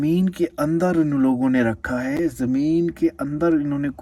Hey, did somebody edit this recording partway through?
no; 0 cuts

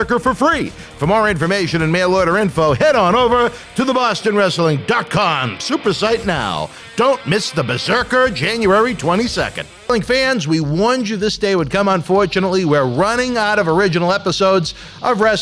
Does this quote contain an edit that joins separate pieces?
yes; 1 cut; at 9.7 s

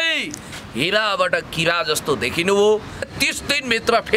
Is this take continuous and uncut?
no; 1 cut; at 3.1 s

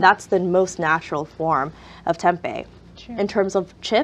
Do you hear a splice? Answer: yes; 1 cut; at 3.1 s

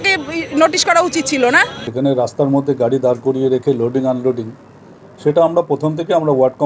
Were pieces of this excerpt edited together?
yes; 1 cut; at 1.8 s

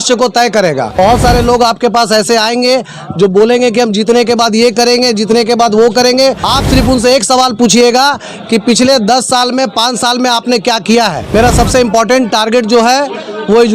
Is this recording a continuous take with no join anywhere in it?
no; 3 cuts; at 1.0 s, 6.4 s, 11.3 s

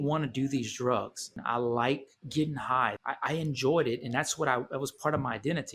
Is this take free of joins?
no; 2 cuts; at 1.3 s, 3.0 s

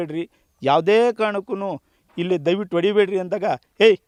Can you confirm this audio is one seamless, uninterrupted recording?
yes; 0 cuts

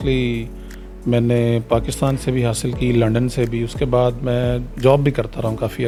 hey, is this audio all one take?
yes; 0 cuts

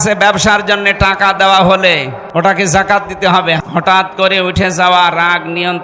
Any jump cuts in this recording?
yes; 2 cuts; at 2.2 s, 3.6 s

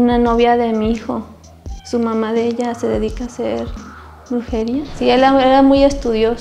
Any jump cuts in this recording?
yes; 1 cut; at 4.9 s

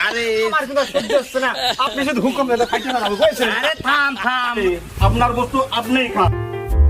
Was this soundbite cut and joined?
yes; 1 cut; at 4.6 s

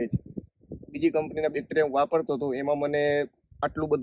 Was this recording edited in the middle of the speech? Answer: no; 0 cuts

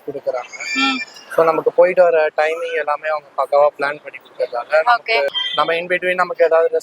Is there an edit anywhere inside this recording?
yes; 1 cut; at 5.4 s

